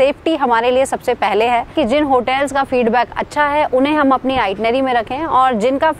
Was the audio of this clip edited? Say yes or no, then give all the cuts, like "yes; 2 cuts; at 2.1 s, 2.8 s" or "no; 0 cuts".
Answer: yes; 1 cut; at 1.7 s